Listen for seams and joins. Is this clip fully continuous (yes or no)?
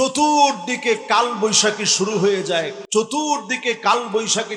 no